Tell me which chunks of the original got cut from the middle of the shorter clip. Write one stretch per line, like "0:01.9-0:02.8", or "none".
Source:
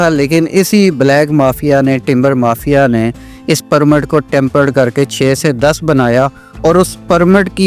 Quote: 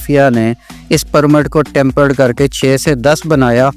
none